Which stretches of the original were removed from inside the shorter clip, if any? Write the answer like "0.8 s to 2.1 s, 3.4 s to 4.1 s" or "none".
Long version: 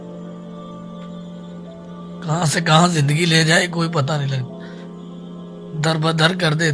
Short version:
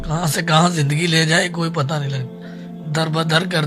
4.9 s to 5.6 s